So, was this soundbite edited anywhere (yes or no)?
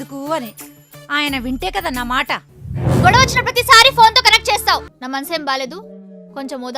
yes